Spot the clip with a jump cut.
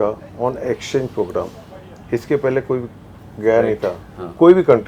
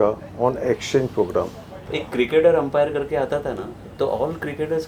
second; 1 cut; at 1.9 s

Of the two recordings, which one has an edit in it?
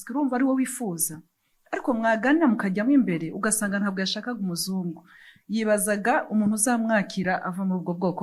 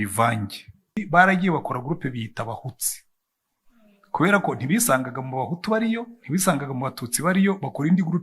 second; 1 cut; at 1.0 s

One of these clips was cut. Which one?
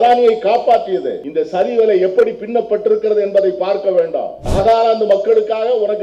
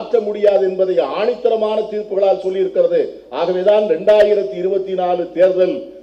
first; 2 cuts; at 1.2 s, 4.4 s

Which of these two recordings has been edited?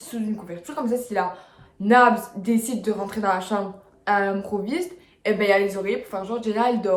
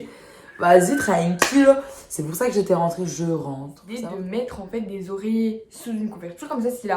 second; 1 cut; at 3.8 s

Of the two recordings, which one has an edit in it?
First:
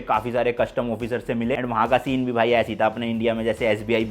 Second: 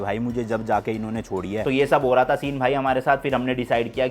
second; 1 cut; at 1.6 s

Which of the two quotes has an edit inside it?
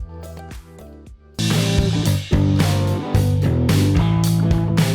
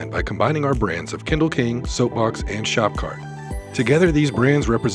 first; 1 cut; at 1.4 s

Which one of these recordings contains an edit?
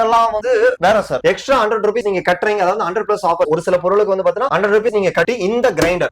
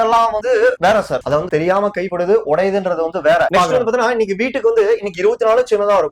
first; 1 cut; at 1.2 s

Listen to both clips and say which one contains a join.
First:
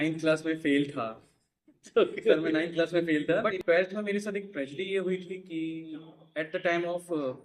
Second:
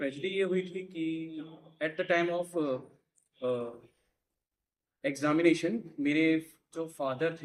first; 1 cut; at 3.5 s

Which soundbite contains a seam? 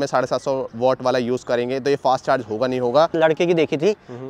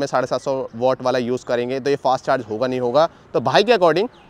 first; 1 cut; at 3.1 s

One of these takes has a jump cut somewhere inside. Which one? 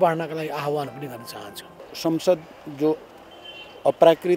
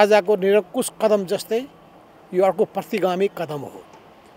first; 1 cut; at 1.9 s

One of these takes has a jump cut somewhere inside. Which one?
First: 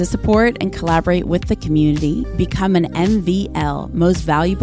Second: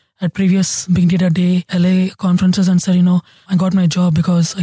second; 3 cuts; at 0.8 s, 1.6 s, 3.4 s

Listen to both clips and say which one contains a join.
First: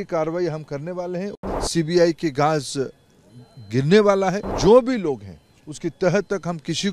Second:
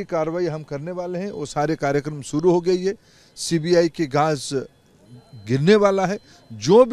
first; 2 cuts; at 1.4 s, 4.5 s

